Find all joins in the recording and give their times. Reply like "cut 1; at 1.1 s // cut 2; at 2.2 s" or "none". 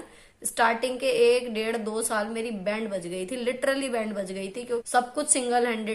cut 1; at 4.8 s